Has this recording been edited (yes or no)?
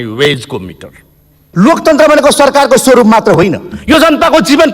yes